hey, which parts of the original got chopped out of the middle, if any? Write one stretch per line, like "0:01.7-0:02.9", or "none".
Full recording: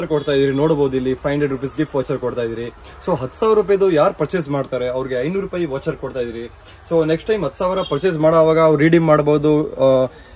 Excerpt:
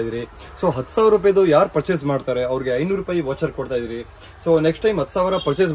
none